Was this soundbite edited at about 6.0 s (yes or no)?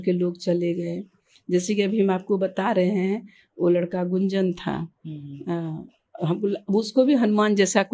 no